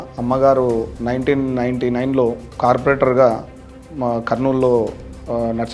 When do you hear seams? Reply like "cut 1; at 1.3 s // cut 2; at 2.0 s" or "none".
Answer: cut 1; at 0.9 s

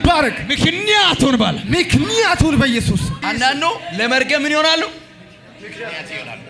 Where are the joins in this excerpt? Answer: cut 1; at 3.1 s

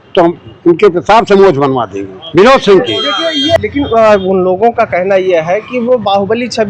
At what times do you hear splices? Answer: cut 1; at 3.6 s

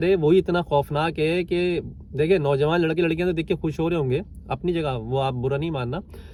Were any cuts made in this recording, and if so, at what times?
none

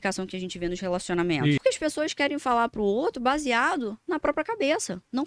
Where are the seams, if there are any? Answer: cut 1; at 1.6 s

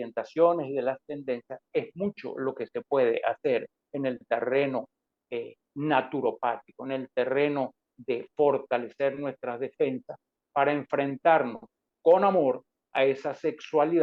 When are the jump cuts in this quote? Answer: none

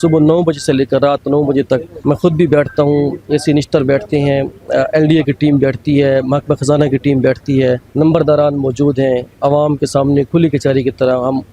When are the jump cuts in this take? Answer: cut 1; at 1.9 s // cut 2; at 7.9 s

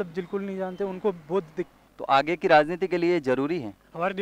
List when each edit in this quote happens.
cut 1; at 1.9 s

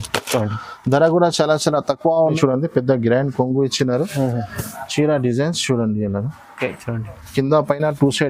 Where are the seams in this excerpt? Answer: cut 1; at 2.4 s

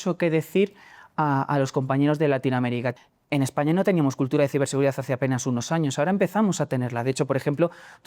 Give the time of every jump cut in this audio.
cut 1; at 2.9 s

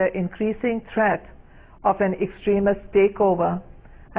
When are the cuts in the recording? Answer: cut 1; at 2.0 s

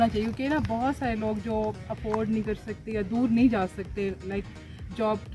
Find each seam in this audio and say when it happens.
none

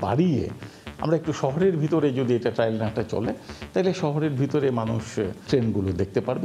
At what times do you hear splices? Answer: cut 1; at 5.4 s

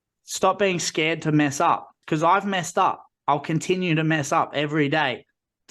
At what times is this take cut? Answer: cut 1; at 2.0 s

